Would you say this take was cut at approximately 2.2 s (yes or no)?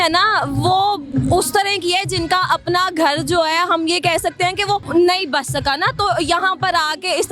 no